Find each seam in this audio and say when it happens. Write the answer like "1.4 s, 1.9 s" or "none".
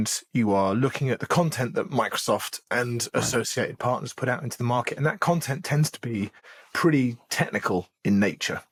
none